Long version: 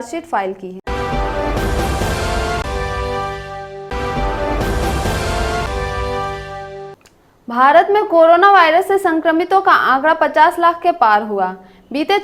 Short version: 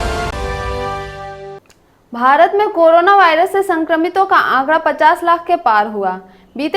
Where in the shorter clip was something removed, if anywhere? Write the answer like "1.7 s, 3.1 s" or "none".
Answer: 1.5 s